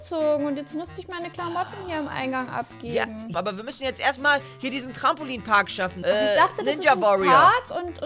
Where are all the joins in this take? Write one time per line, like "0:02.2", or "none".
0:03.3
0:06.0